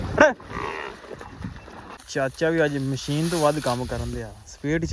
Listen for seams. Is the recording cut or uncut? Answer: cut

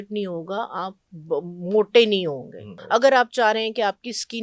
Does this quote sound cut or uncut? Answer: cut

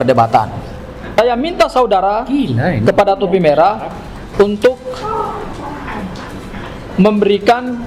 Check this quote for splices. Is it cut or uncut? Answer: cut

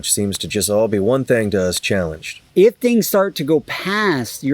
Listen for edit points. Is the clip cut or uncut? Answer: cut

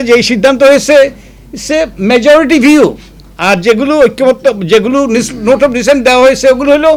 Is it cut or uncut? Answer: uncut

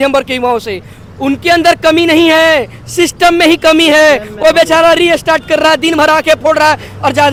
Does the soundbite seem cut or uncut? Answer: uncut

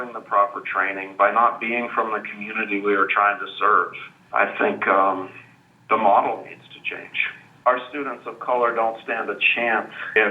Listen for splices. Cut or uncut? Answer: cut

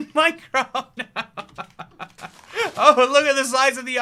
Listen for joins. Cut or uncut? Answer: uncut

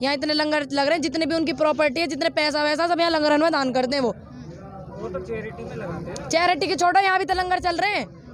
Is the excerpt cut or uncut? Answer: uncut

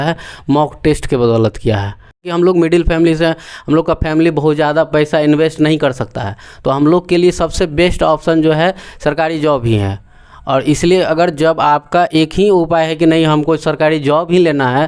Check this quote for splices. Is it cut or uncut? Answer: cut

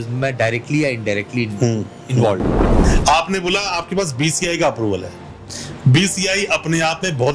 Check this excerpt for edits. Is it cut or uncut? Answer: cut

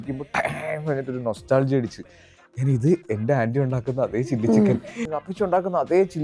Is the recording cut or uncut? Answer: cut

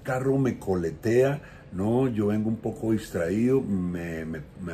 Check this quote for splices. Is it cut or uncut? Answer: uncut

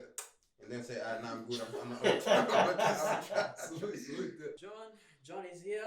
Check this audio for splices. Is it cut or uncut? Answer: cut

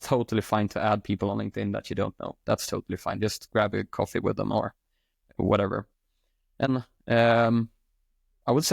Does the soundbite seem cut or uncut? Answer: cut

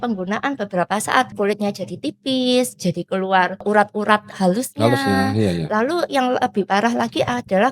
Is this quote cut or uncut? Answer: cut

